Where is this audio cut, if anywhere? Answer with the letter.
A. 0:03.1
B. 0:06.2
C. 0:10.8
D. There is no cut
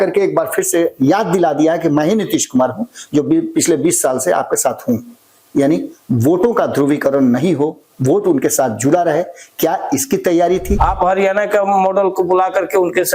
C